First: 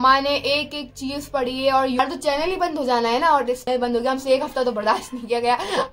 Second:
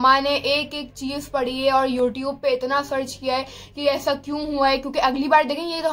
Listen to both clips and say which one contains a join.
first; 2 cuts; at 2.0 s, 3.6 s

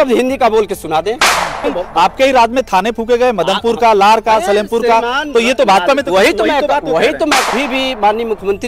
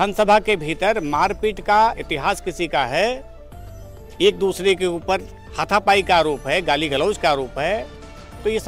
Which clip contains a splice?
first; 2 cuts; at 1.6 s, 7.5 s

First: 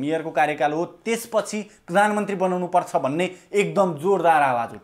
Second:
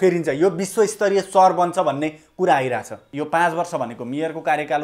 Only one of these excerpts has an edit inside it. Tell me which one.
second; 1 cut; at 3.0 s

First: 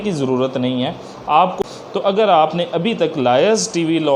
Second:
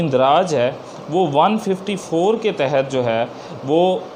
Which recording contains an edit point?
first; 1 cut; at 1.6 s

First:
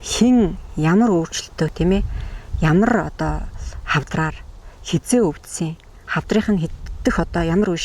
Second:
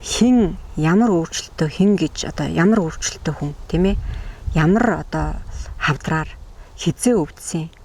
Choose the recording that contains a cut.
first; 1 cut; at 1.7 s

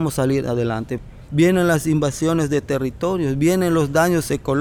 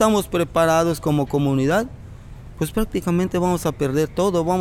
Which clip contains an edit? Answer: first; 1 cut; at 1.0 s

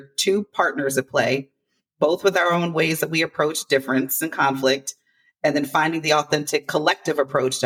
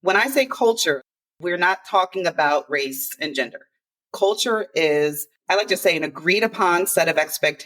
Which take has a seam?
second; 2 cuts; at 1.1 s, 5.3 s

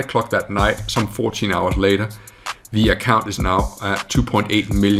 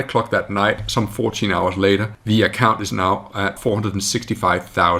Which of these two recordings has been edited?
second; 2 cuts; at 2.1 s, 3.6 s

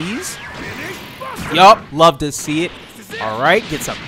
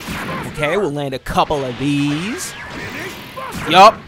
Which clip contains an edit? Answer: first; 1 cut; at 2.8 s

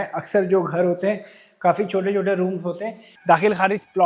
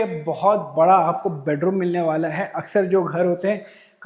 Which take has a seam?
first; 1 cut; at 3.2 s

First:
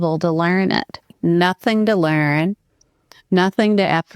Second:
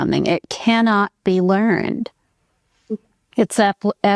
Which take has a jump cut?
first; 1 cut; at 1.1 s

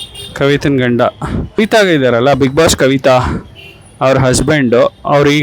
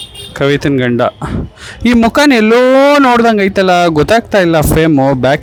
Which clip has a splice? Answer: first; 1 cut; at 1.3 s

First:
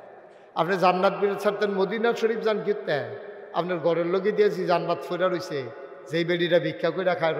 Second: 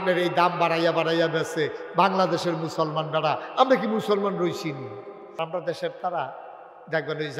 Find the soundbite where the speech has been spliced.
second; 1 cut; at 5.4 s

